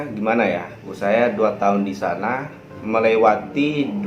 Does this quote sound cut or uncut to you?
cut